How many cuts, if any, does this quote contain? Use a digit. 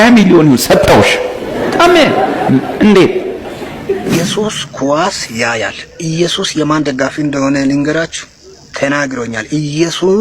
1